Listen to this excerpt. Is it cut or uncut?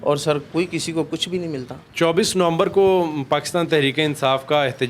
uncut